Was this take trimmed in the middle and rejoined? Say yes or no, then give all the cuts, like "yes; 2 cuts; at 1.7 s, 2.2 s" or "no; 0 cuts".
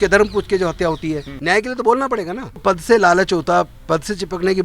yes; 2 cuts; at 1.3 s, 2.6 s